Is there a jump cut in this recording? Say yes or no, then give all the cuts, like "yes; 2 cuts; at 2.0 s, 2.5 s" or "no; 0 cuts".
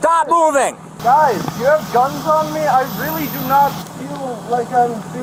no; 0 cuts